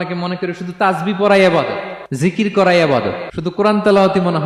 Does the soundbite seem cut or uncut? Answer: cut